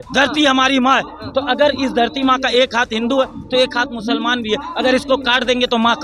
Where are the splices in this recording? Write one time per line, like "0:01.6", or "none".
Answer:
none